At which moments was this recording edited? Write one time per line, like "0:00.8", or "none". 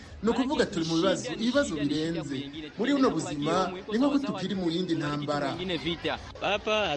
none